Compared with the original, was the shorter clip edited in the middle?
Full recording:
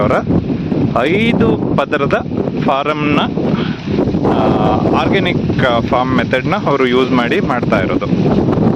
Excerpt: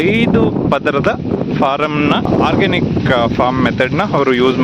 yes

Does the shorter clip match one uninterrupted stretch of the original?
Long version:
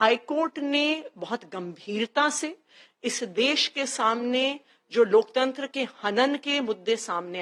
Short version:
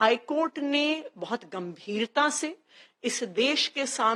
yes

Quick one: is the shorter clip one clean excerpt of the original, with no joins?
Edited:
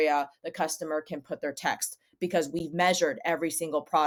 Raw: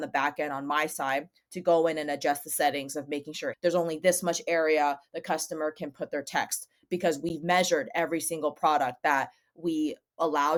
yes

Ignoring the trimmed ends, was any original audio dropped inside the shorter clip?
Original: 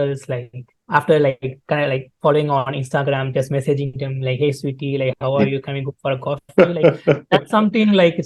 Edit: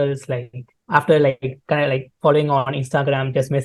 no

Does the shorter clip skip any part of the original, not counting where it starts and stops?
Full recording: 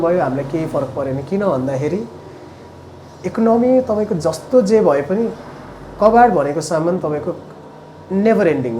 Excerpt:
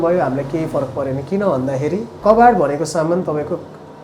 yes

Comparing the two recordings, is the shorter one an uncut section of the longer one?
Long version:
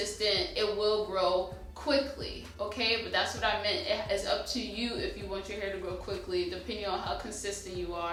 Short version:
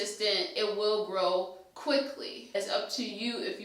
no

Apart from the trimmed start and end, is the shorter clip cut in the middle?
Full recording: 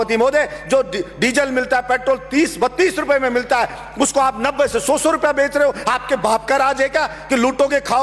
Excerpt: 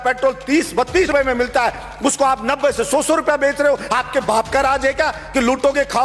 yes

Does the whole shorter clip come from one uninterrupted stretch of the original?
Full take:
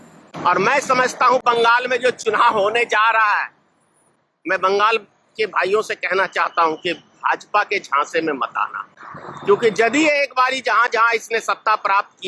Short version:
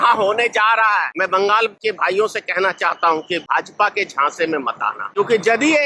no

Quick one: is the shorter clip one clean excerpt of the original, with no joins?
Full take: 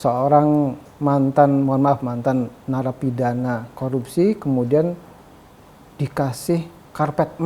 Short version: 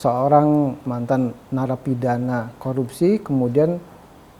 no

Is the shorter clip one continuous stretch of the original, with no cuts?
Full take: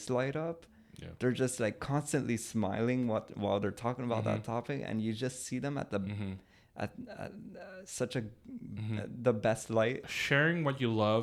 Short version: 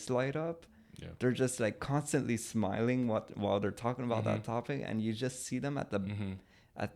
yes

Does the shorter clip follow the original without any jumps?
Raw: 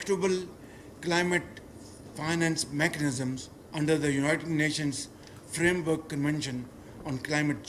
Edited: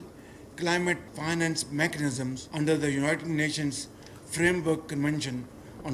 no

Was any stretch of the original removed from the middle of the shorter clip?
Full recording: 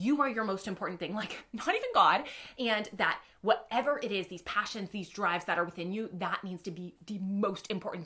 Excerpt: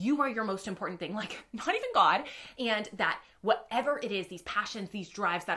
no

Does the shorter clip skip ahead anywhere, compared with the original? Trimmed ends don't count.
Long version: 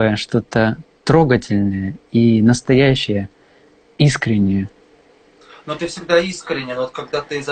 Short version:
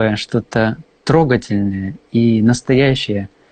no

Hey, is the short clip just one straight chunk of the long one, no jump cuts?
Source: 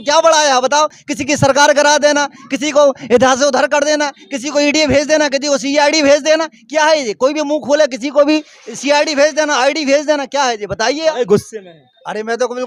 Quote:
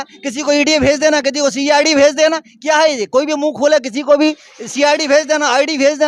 yes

